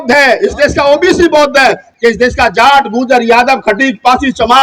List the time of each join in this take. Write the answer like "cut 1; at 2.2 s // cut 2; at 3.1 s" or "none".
cut 1; at 1.9 s

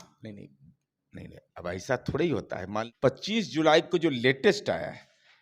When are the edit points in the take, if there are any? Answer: cut 1; at 2.8 s

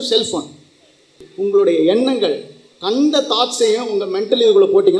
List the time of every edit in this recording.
cut 1; at 1.2 s

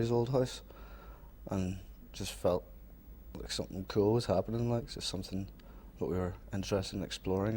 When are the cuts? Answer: none

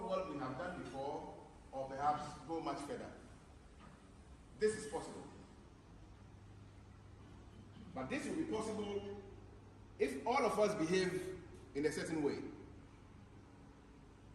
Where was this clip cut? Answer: none

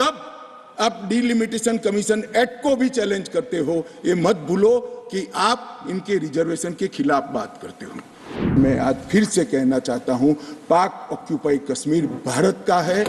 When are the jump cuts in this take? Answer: cut 1; at 8.5 s

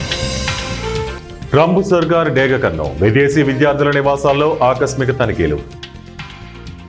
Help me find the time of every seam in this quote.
cut 1; at 1.2 s

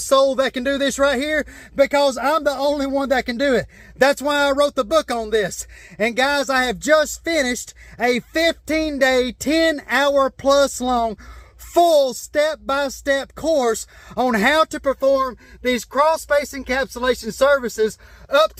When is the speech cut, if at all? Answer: none

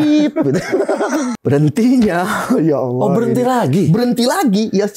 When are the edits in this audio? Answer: cut 1; at 1.3 s

